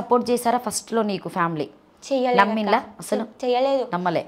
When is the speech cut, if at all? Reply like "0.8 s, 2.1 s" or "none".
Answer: none